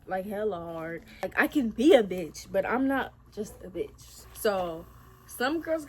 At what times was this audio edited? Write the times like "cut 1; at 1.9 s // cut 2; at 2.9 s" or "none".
cut 1; at 1.2 s // cut 2; at 4.1 s

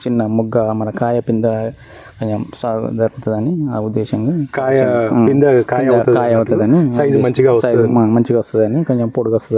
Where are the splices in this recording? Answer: none

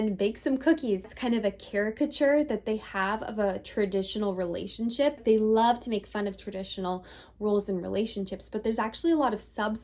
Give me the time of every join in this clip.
cut 1; at 1.1 s // cut 2; at 5.2 s

